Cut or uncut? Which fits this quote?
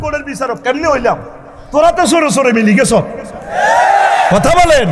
uncut